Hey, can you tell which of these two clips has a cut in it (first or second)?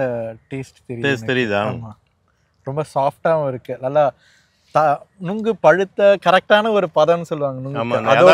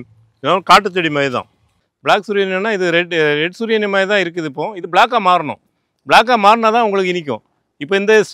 second